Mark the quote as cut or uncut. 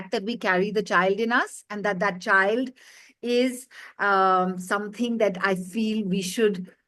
uncut